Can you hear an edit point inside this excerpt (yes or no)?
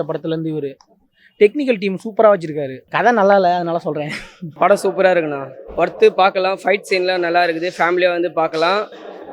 yes